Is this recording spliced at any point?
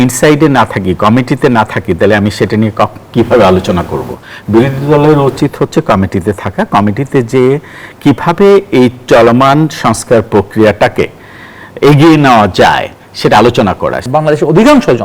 yes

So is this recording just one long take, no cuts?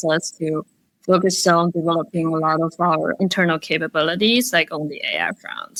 yes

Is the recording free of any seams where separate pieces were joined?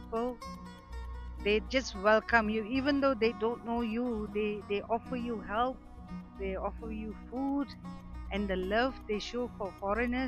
yes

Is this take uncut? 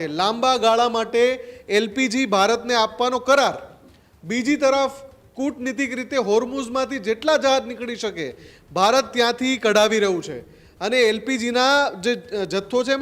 yes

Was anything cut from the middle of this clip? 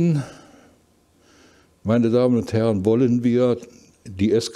no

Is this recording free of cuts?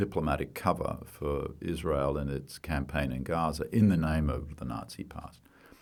yes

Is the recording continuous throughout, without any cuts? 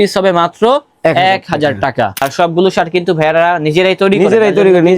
no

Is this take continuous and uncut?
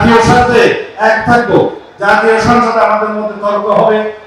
yes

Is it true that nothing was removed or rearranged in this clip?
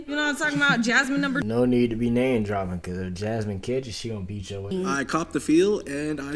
no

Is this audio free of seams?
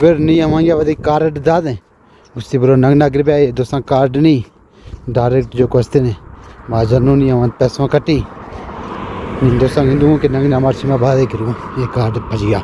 yes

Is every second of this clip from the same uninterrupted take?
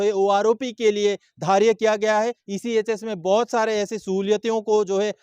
no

